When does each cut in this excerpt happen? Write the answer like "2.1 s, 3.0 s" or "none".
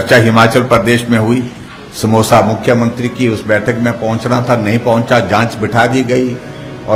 none